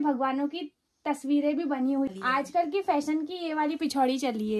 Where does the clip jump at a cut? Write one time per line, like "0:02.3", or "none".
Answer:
0:02.1